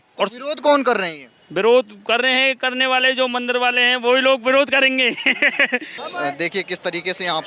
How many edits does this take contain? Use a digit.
1